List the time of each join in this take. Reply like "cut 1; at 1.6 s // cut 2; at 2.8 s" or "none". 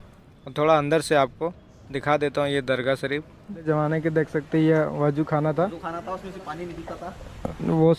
cut 1; at 3.6 s